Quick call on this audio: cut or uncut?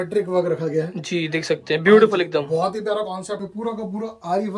cut